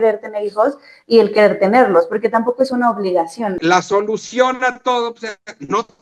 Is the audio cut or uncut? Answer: cut